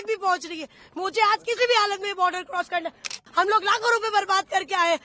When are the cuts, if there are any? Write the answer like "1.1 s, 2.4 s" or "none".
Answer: 3.1 s